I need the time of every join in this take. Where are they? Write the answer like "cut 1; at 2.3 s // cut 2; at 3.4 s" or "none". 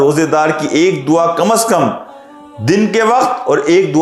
none